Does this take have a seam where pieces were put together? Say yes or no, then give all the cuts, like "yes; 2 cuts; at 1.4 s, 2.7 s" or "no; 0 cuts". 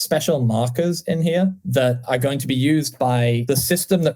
yes; 2 cuts; at 2.0 s, 3.4 s